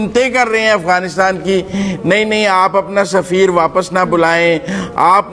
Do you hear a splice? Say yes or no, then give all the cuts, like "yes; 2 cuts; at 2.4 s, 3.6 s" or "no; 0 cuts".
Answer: no; 0 cuts